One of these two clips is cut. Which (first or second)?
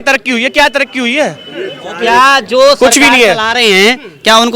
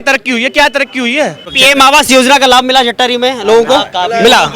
second